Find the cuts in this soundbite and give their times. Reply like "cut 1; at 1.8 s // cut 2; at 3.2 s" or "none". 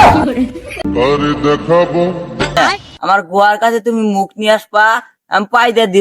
cut 1; at 2.6 s

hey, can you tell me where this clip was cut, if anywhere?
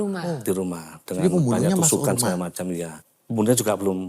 cut 1; at 3.0 s

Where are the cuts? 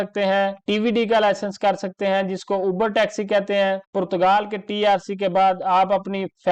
none

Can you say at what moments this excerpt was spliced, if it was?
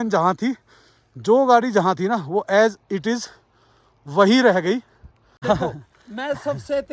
cut 1; at 5.3 s

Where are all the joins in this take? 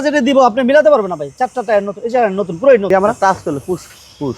cut 1; at 2.9 s

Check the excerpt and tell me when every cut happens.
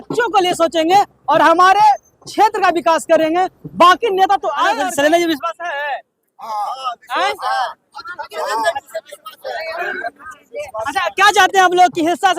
cut 1; at 4.7 s

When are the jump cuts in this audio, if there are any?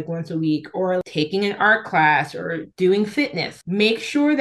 cut 1; at 1.0 s // cut 2; at 2.7 s // cut 3; at 3.5 s

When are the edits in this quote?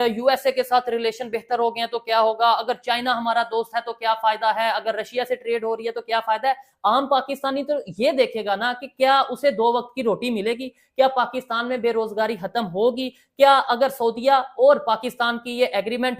none

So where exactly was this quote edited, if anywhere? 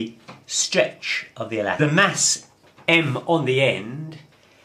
none

